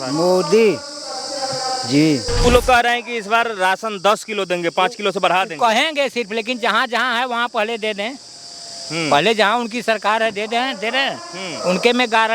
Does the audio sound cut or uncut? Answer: cut